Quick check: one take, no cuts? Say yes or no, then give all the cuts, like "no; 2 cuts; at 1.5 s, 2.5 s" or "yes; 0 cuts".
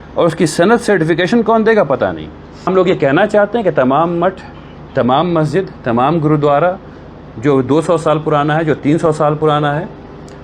no; 1 cut; at 2.7 s